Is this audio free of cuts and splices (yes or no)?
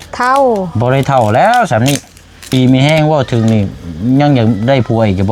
no